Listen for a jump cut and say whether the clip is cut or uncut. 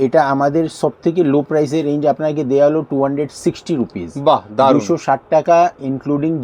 uncut